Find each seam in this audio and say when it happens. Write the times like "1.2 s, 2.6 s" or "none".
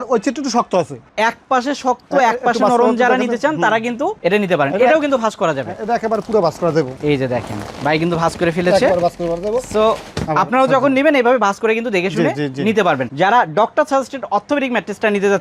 1.1 s, 13.1 s